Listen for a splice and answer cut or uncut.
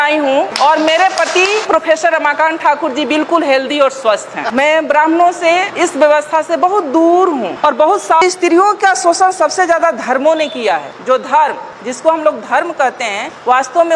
cut